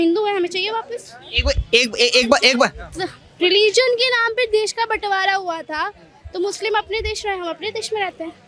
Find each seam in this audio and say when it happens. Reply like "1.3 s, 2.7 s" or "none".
none